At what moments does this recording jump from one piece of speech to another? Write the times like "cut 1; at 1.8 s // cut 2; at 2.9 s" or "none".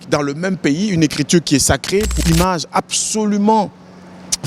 cut 1; at 2.2 s